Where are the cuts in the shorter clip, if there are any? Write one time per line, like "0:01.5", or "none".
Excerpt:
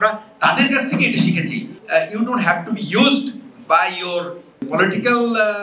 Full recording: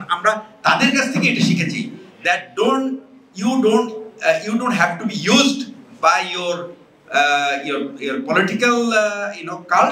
0:01.7
0:04.6